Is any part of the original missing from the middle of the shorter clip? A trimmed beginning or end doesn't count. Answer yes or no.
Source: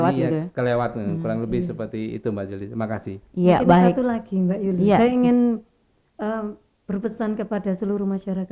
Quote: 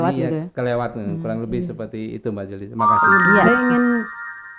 yes